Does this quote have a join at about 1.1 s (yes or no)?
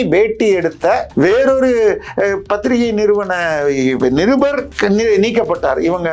yes